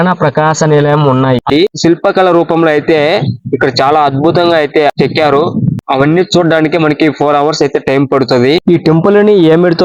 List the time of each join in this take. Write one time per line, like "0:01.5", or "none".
0:01.5